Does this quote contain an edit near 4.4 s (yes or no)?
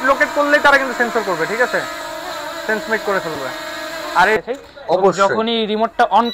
yes